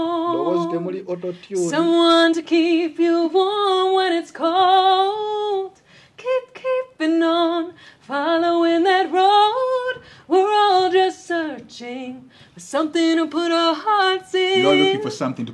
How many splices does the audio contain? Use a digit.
0